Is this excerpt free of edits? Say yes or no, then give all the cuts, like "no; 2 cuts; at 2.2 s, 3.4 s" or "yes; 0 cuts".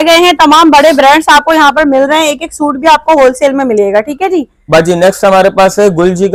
yes; 0 cuts